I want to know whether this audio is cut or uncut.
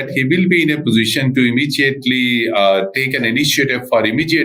uncut